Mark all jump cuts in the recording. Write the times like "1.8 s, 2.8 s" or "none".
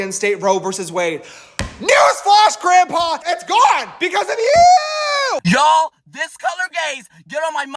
3.2 s, 5.4 s